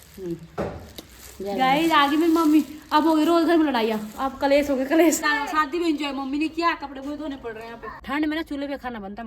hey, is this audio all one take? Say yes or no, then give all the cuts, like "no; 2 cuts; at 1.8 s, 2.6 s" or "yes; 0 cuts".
no; 2 cuts; at 5.3 s, 7.9 s